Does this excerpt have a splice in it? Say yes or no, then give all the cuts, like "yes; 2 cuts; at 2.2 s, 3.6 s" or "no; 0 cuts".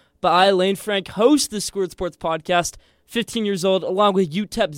no; 0 cuts